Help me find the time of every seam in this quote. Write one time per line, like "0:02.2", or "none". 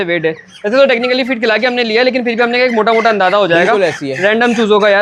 none